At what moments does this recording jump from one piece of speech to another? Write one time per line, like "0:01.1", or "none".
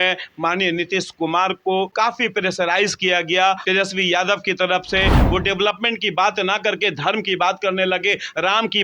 0:01.9
0:03.6
0:05.2